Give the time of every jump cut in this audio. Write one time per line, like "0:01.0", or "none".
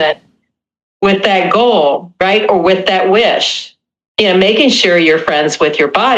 0:04.0